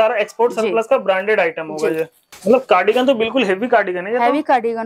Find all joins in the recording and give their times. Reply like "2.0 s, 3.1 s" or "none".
2.2 s